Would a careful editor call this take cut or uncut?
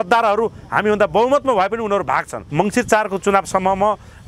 cut